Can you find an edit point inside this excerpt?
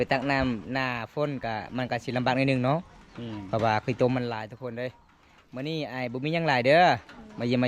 no; 0 cuts

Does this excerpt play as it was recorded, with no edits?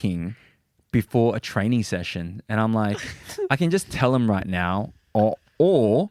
yes; 0 cuts

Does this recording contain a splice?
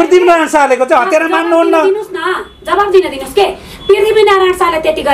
no; 0 cuts

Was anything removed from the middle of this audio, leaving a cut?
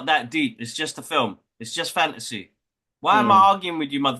no; 0 cuts

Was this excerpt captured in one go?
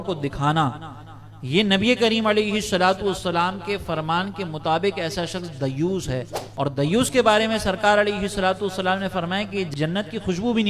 no; 2 cuts; at 6.4 s, 9.7 s

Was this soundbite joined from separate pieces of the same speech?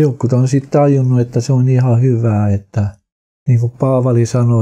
yes; 1 cut; at 3.0 s

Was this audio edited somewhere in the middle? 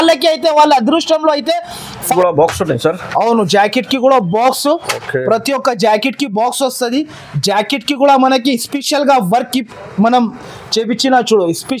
yes; 1 cut; at 2.1 s

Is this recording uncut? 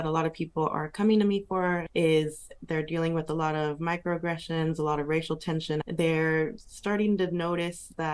no; 2 cuts; at 1.9 s, 5.8 s

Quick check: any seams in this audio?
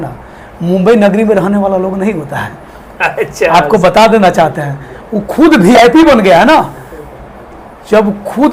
no; 0 cuts

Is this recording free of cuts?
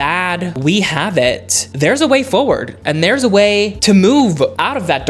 yes; 0 cuts

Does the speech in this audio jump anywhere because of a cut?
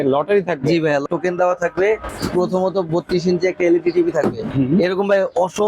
yes; 3 cuts; at 1.1 s, 2.1 s, 4.4 s

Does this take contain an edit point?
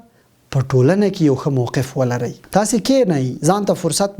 yes; 1 cut; at 2.4 s

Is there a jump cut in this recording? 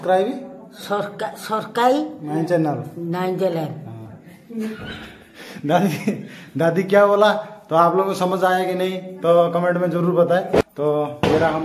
yes; 1 cut; at 10.6 s

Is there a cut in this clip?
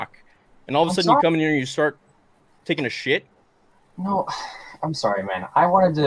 no; 0 cuts

